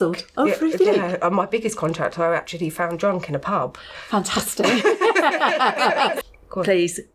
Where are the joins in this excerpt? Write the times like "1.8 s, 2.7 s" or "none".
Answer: 6.2 s